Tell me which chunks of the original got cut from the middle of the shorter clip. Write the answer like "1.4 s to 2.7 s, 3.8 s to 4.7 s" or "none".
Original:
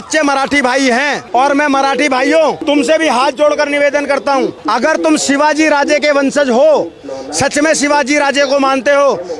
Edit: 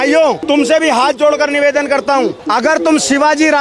none